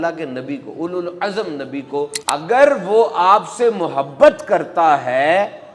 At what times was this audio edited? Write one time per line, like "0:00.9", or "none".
0:02.2